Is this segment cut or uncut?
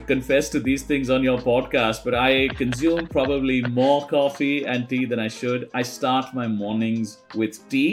uncut